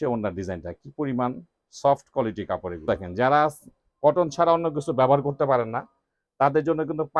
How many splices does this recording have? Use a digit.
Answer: 1